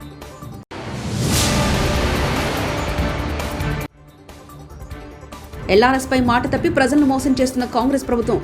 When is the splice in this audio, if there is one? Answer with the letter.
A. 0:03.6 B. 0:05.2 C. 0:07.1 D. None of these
B